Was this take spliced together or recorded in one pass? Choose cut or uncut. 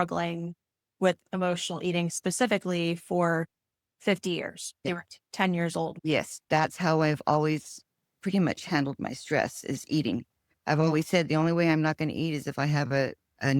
cut